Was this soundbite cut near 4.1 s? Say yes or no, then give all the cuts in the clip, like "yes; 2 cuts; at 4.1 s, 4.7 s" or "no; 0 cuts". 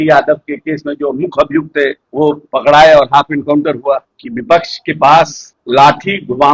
yes; 1 cut; at 4.1 s